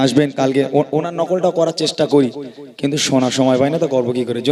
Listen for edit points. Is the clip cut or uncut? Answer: uncut